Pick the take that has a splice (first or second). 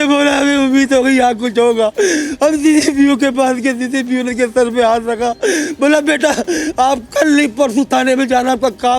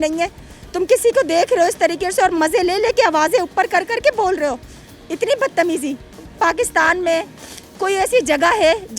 second